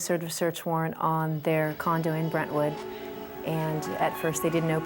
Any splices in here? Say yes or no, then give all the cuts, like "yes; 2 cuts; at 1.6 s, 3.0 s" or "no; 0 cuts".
no; 0 cuts